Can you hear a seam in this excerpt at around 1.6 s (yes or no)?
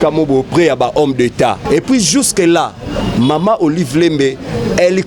yes